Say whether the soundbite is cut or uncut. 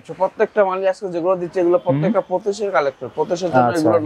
uncut